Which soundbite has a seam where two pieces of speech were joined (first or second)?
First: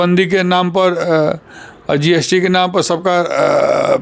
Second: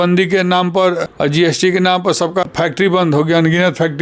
second